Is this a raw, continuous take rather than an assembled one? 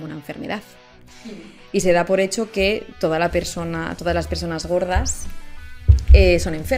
yes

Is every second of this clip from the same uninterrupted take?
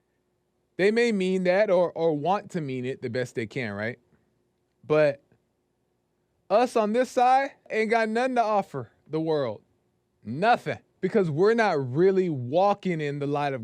no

